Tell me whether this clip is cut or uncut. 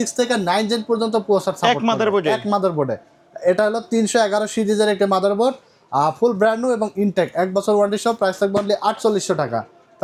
uncut